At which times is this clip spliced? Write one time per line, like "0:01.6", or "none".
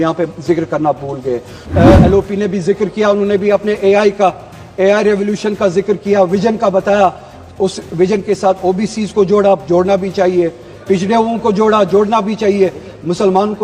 0:01.6

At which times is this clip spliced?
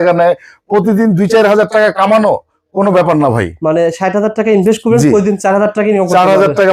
none

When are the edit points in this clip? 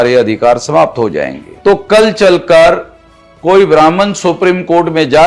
0:01.4

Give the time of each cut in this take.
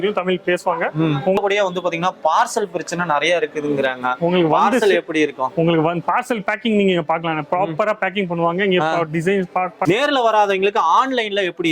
0:01.4
0:09.8

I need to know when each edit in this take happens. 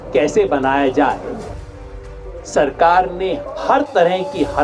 0:01.9
0:03.4

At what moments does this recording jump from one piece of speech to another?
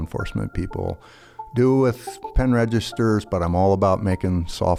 none

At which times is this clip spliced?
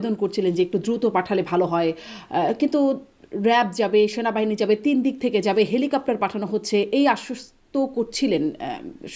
none

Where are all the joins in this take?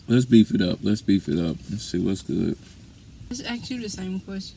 0:03.3

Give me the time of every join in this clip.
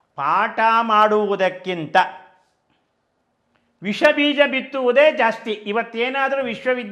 none

